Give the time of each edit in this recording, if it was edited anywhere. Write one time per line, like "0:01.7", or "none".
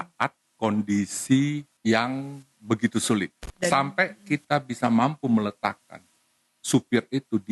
0:01.7
0:03.4